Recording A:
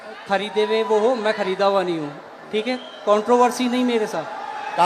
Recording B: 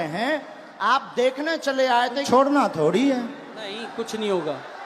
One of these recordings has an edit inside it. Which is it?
B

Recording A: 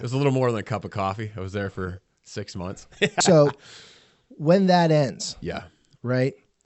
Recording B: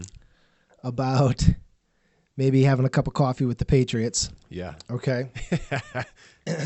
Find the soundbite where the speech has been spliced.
A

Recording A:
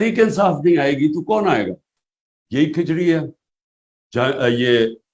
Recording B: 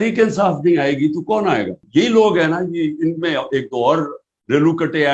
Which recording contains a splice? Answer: B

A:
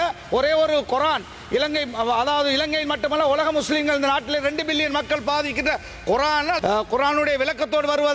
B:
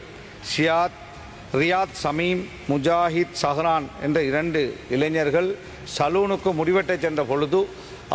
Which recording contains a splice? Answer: A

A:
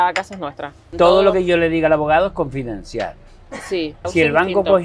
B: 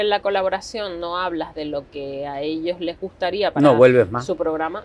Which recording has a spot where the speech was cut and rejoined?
A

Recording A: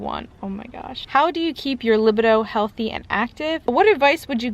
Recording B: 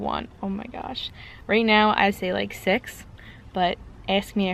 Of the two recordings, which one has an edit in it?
A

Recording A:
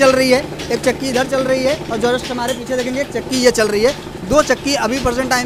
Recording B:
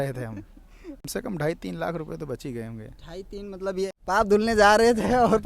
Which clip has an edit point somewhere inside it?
B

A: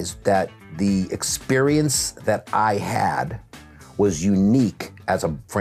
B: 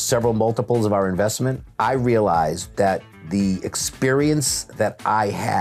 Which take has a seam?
B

